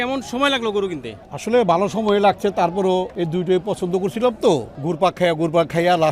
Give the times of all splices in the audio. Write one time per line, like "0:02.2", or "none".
0:03.1
0:04.8